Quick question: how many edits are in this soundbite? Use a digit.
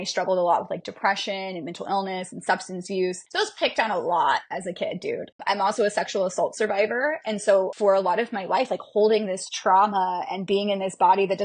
3